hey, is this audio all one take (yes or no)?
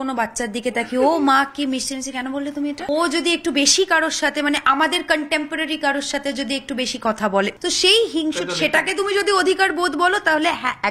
no